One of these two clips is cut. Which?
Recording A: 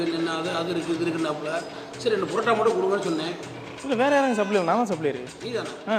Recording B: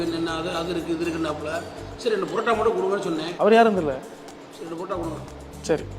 B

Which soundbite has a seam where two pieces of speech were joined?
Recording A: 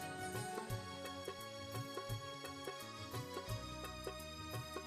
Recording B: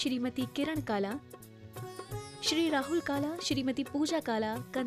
B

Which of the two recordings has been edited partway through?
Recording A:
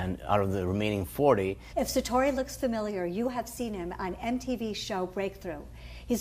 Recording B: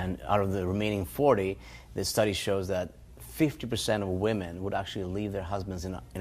B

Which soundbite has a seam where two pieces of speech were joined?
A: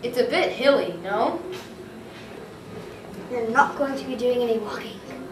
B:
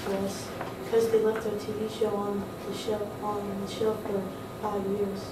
A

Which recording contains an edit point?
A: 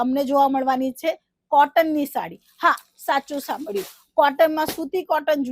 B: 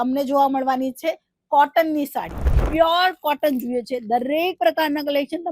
B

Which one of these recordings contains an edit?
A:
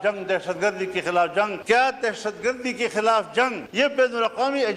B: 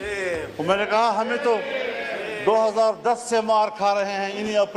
A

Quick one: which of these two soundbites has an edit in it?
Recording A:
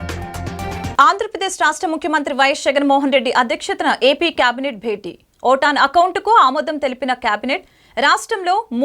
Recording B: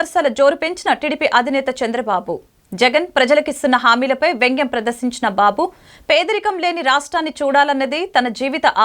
A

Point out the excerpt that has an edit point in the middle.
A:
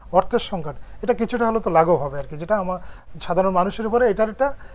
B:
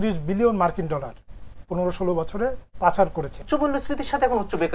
B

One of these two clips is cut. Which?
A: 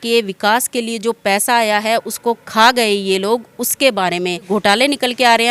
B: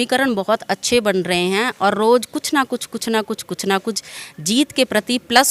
A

